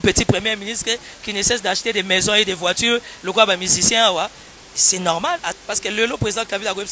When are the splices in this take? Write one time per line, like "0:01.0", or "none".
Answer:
0:05.5